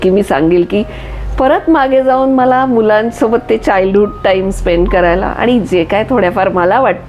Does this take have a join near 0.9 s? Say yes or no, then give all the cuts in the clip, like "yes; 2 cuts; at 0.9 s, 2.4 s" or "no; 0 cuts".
no; 0 cuts